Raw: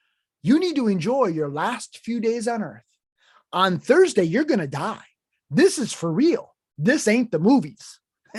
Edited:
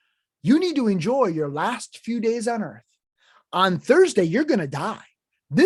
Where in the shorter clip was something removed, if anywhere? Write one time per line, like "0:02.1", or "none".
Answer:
none